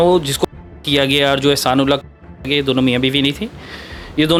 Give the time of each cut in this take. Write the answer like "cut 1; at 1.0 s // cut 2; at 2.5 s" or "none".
none